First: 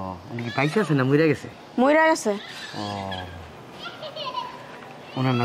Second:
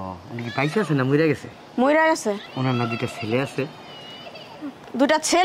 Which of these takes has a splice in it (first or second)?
second